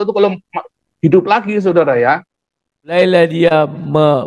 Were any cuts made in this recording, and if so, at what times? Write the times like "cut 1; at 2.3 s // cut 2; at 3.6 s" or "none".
cut 1; at 2.9 s